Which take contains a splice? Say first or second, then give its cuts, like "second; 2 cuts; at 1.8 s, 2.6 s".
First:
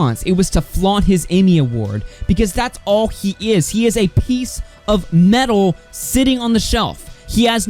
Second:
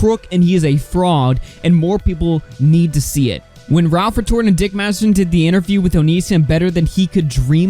second; 1 cut; at 3.5 s